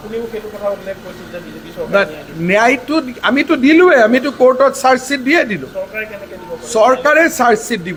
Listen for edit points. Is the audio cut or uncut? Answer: uncut